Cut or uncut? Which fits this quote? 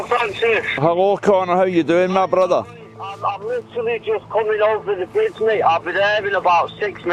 uncut